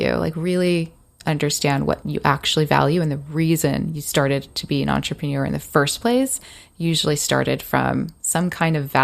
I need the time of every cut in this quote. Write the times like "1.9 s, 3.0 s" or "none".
2.0 s

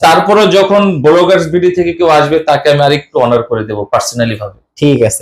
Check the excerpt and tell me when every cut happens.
none

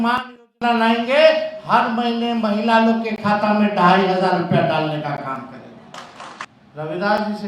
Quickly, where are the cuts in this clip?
6.5 s

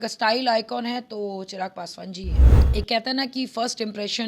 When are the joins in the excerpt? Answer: 2.4 s

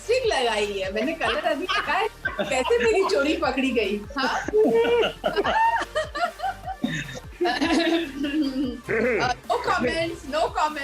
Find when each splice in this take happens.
none

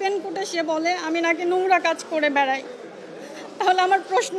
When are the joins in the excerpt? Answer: none

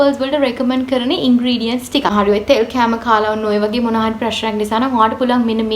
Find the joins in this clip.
2.1 s

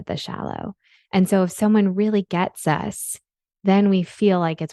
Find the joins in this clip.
none

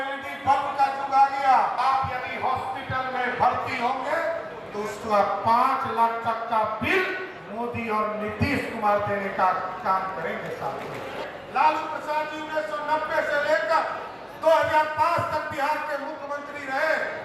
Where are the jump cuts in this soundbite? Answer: 1.8 s, 11.2 s

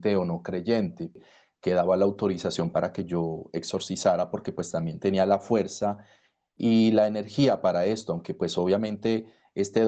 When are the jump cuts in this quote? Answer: 1.2 s

